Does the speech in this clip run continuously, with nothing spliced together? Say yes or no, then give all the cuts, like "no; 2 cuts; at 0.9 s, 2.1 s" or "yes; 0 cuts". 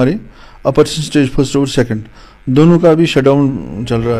yes; 0 cuts